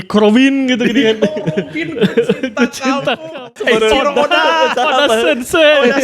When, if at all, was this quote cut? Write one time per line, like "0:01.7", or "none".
0:03.5

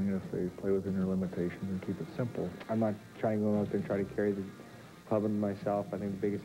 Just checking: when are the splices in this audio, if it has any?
0:02.5

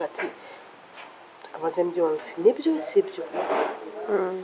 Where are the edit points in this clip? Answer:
none

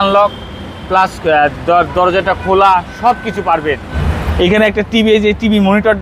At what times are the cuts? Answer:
0:03.9

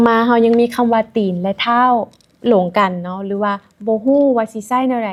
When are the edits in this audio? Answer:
none

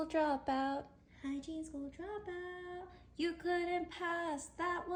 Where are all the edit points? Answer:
none

